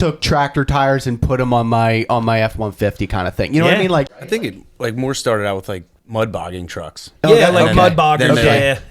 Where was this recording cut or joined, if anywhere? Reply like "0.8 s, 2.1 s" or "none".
4.1 s, 5.9 s